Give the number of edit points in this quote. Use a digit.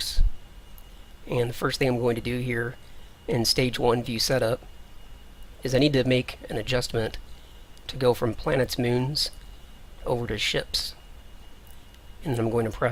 0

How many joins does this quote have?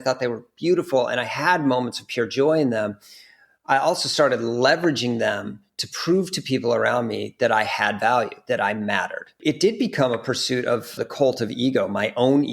2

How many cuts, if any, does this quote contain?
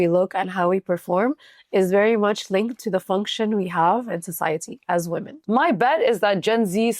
1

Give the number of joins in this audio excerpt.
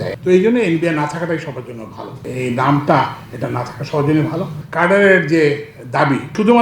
1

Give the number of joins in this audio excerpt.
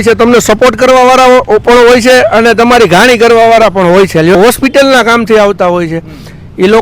1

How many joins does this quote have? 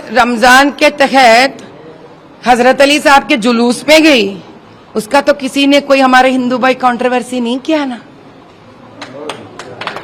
0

